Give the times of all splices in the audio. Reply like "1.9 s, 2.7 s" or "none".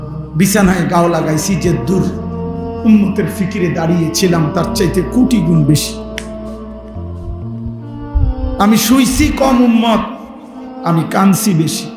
5.8 s, 7.5 s